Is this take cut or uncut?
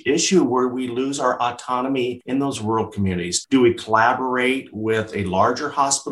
uncut